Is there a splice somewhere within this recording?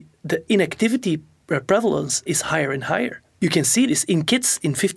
yes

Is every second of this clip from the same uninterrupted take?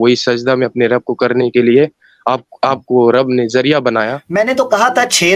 no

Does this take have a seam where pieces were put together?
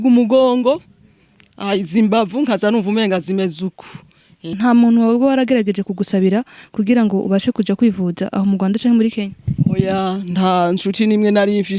yes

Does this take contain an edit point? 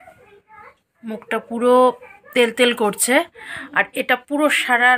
no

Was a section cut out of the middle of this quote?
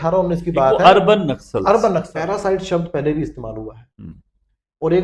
yes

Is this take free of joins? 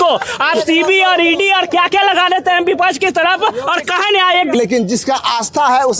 no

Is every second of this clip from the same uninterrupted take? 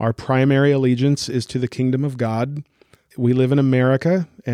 no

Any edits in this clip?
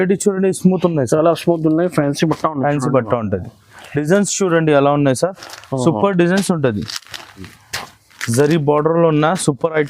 yes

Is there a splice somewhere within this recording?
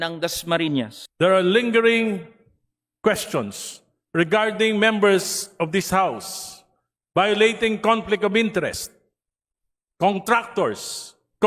yes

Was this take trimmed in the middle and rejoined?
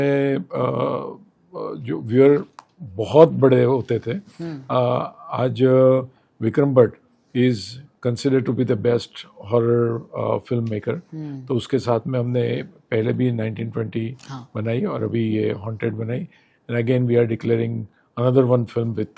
no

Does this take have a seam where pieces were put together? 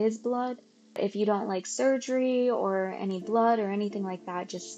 no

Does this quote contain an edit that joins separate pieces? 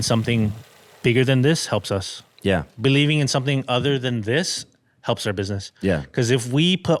no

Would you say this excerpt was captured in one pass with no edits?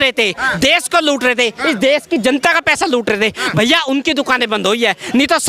yes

